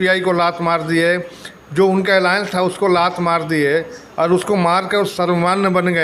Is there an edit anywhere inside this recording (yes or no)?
no